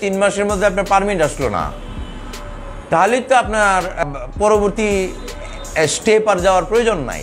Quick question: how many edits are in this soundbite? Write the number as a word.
one